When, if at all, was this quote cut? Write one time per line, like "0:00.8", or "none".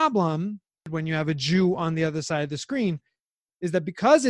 0:00.9